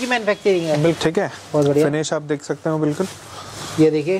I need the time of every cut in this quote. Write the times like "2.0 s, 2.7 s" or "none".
1.0 s